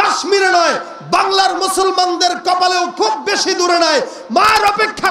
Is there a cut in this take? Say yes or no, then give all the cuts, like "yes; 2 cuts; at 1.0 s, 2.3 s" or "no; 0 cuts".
no; 0 cuts